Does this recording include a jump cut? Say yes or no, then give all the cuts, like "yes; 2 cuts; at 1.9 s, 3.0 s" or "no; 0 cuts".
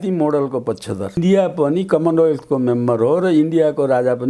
yes; 1 cut; at 1.2 s